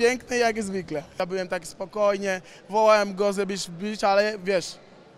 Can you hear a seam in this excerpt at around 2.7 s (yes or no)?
no